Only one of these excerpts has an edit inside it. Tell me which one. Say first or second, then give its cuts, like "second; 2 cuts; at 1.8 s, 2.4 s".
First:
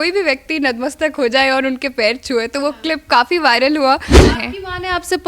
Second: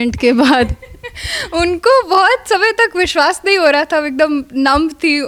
first; 1 cut; at 4.2 s